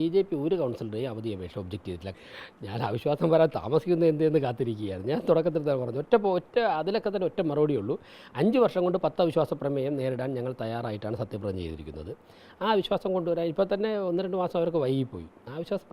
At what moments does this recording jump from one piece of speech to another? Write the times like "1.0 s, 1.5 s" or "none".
2.1 s